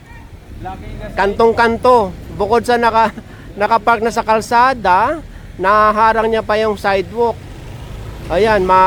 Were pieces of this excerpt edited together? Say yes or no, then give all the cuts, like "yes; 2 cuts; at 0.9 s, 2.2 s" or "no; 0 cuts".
no; 0 cuts